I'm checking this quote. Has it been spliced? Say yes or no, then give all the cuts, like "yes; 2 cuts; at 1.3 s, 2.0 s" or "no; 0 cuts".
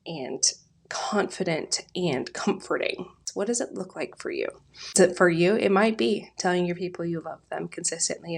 yes; 2 cuts; at 3.2 s, 5.0 s